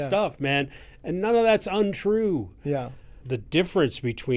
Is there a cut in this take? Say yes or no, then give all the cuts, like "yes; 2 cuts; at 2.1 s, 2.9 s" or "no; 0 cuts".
yes; 1 cut; at 3.2 s